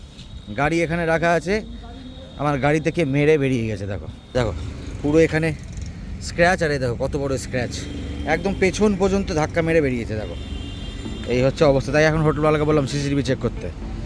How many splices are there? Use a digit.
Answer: 0